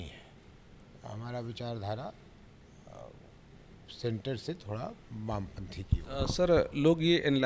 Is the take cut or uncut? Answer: uncut